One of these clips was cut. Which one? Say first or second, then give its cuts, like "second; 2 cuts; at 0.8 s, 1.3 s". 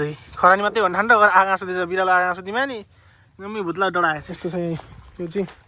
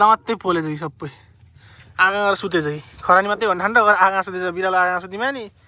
first; 1 cut; at 4.3 s